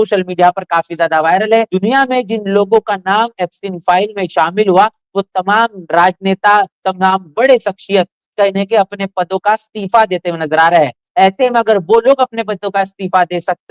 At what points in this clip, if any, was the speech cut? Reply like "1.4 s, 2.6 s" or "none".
1.7 s